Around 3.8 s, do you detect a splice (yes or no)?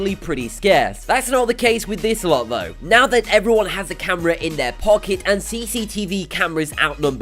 yes